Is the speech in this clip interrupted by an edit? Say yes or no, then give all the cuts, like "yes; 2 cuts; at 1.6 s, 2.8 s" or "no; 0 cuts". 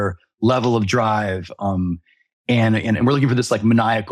no; 0 cuts